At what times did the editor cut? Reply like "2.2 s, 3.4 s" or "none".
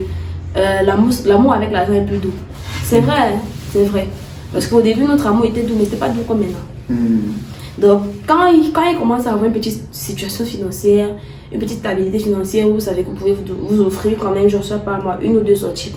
none